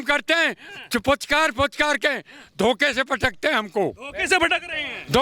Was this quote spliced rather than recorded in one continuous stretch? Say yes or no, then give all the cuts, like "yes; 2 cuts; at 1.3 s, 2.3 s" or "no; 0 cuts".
no; 0 cuts